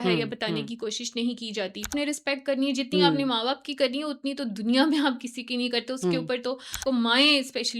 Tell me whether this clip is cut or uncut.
cut